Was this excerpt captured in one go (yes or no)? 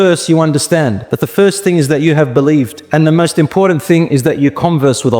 no